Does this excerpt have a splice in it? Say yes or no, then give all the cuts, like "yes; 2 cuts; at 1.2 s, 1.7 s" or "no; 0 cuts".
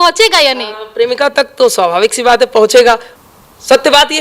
yes; 1 cut; at 3.1 s